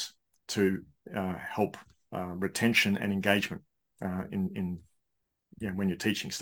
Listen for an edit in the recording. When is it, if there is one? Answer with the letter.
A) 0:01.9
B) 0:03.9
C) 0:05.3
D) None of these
D